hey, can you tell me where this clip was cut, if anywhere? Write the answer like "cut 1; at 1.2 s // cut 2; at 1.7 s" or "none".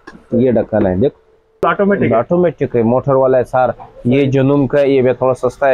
cut 1; at 1.6 s